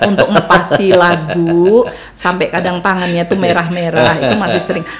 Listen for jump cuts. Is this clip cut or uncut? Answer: uncut